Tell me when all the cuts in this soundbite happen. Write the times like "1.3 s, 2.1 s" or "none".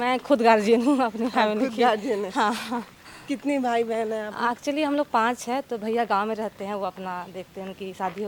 none